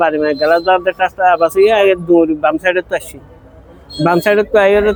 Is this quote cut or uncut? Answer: uncut